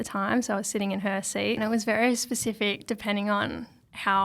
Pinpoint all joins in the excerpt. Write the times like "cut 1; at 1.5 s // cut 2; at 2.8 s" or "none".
cut 1; at 1.6 s